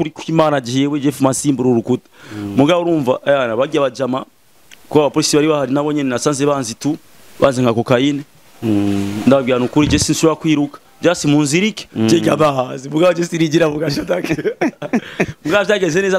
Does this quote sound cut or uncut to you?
uncut